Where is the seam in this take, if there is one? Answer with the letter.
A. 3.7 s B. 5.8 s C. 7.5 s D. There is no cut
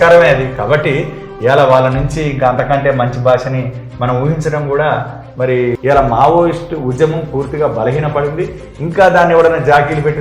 B